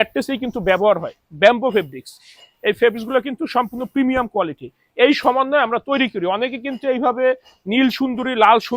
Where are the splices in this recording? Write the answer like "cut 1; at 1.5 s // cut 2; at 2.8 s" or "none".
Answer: none